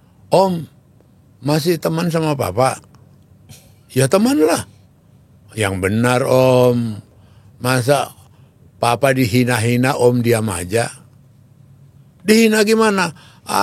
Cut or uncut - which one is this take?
uncut